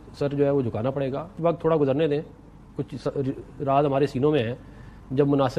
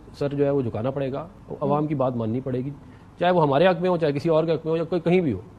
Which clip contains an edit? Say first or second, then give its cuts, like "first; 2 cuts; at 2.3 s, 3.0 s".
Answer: first; 1 cut; at 1.3 s